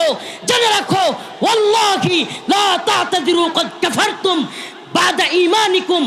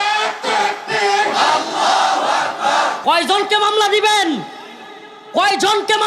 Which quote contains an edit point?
second; 1 cut; at 3.0 s

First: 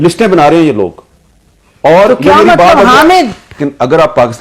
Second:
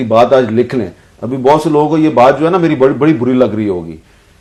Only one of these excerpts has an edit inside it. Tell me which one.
first; 1 cut; at 3.5 s

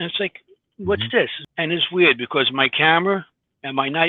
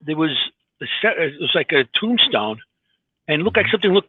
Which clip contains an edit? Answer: first; 1 cut; at 1.4 s

